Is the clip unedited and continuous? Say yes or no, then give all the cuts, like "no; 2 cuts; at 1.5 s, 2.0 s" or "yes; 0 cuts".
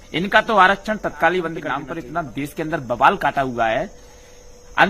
no; 1 cut; at 1.8 s